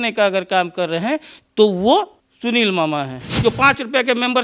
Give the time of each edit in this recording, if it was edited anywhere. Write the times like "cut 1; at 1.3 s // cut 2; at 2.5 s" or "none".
cut 1; at 2.2 s // cut 2; at 3.2 s